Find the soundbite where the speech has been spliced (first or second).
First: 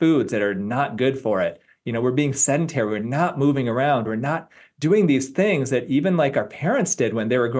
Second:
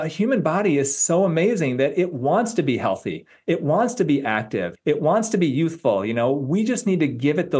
second